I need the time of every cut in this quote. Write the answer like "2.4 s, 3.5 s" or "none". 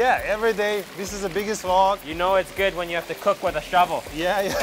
2.1 s